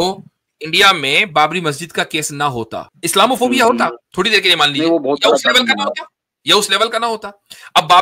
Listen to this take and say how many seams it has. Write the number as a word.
two